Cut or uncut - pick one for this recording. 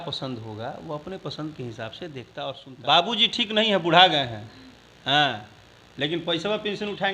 cut